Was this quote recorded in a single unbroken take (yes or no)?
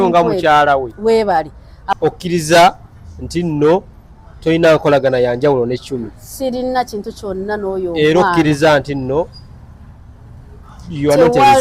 no